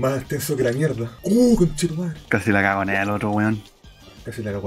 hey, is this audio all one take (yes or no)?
no